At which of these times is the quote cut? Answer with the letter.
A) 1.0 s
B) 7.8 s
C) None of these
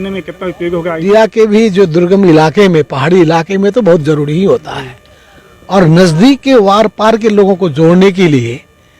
A